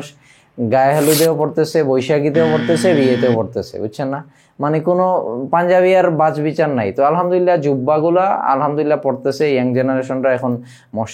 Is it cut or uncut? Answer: uncut